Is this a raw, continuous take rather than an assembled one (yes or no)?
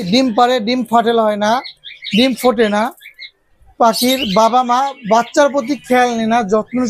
yes